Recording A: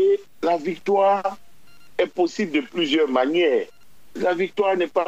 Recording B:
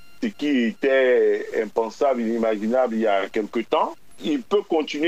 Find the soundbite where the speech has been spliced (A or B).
B